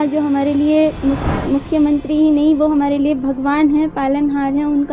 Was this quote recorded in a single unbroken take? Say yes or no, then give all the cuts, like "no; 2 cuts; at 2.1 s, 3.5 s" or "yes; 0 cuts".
yes; 0 cuts